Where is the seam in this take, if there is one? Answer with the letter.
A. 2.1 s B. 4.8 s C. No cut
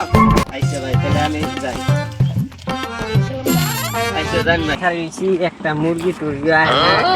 B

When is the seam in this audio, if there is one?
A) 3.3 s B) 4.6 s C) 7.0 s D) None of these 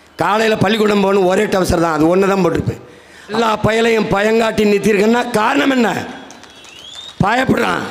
A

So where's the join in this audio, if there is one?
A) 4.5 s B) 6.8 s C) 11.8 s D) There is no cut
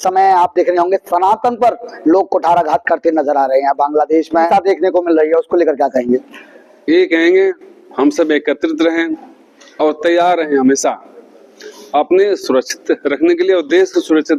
A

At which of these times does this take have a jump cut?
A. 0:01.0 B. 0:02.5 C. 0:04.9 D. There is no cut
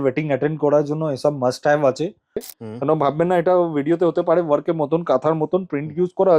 B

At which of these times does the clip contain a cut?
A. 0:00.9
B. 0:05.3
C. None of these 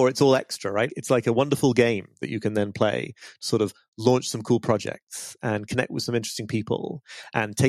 A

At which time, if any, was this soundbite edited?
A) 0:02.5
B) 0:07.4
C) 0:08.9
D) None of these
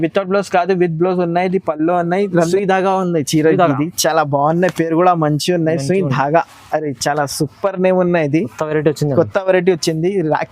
A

